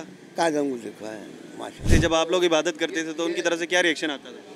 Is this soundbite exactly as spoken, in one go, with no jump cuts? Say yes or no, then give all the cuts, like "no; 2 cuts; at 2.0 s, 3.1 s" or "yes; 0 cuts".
no; 1 cut; at 1.9 s